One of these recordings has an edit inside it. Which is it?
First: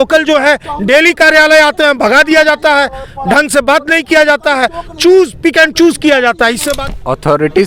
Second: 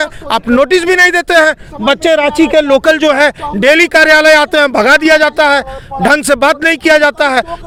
first; 1 cut; at 6.8 s

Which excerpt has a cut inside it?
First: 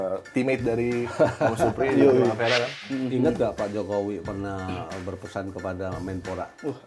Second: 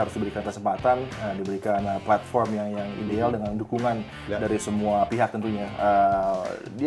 first; 1 cut; at 2.8 s

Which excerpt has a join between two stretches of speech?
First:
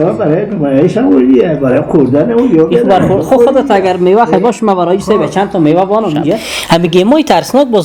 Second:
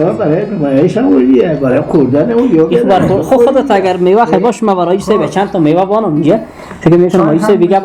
first; 1 cut; at 6.5 s

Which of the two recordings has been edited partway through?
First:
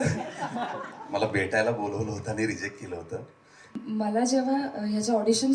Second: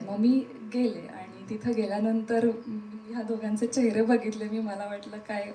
first; 1 cut; at 3.8 s

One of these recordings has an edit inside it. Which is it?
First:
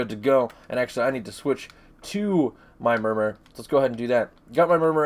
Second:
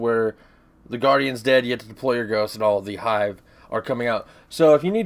first; 1 cut; at 1.4 s

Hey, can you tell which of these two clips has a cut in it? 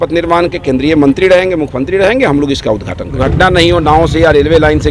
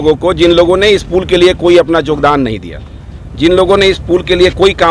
first; 1 cut; at 3.1 s

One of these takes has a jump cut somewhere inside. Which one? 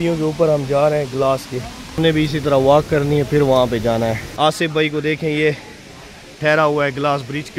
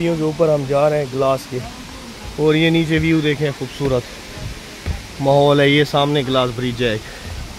first; 2 cuts; at 2.0 s, 4.2 s

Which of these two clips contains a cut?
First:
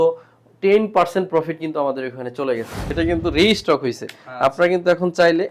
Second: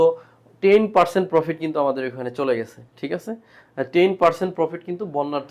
first; 1 cut; at 2.8 s

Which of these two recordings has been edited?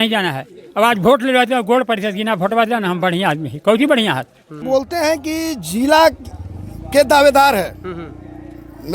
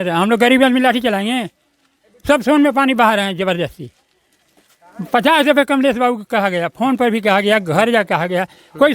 first; 1 cut; at 4.6 s

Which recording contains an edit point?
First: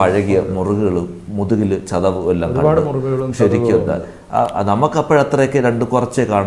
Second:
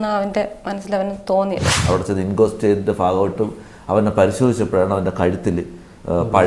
second; 1 cut; at 1.8 s

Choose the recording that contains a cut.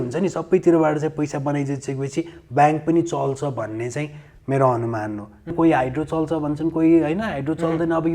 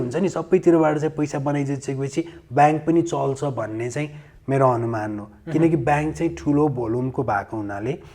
first; 1 cut; at 5.5 s

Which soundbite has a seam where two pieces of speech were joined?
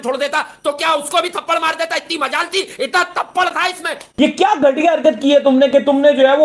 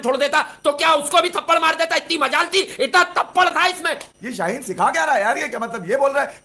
first; 1 cut; at 4.1 s

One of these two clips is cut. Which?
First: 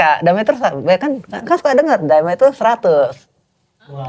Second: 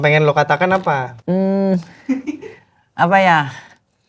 second; 1 cut; at 1.1 s

